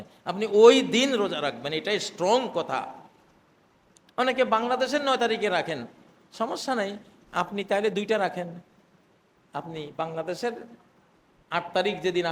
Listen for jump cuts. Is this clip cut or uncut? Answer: uncut